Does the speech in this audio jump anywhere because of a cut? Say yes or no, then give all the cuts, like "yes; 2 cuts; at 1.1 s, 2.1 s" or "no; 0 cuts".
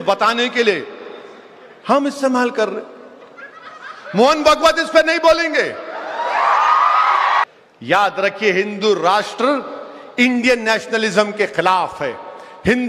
yes; 1 cut; at 7.4 s